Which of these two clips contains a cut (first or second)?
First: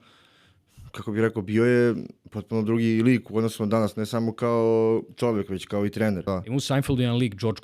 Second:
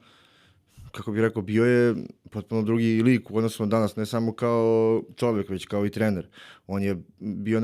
first